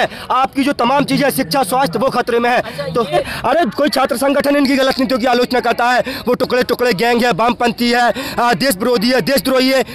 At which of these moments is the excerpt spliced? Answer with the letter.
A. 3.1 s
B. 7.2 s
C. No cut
A